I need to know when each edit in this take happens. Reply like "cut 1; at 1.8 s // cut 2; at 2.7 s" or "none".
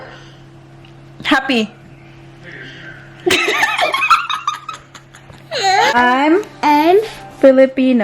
cut 1; at 5.9 s